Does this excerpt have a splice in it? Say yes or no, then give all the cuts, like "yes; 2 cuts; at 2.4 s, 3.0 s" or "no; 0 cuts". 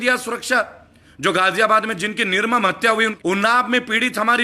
yes; 1 cut; at 3.1 s